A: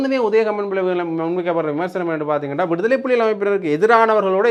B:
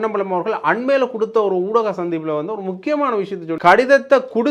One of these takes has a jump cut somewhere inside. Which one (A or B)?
B